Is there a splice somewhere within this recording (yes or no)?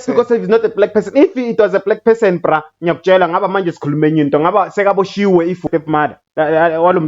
yes